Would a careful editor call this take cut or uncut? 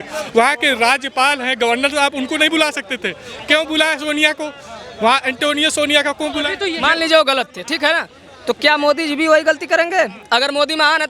cut